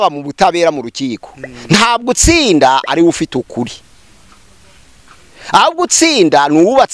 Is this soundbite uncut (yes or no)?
yes